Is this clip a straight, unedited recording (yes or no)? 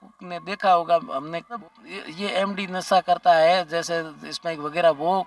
no